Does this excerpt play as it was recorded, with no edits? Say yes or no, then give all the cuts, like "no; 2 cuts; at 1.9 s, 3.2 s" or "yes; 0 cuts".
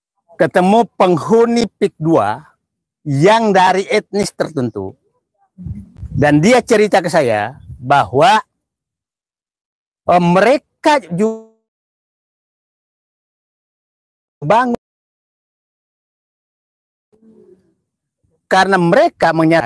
yes; 0 cuts